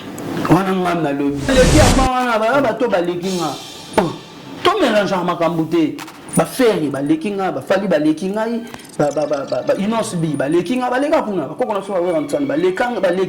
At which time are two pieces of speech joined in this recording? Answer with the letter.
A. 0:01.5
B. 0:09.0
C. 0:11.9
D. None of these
A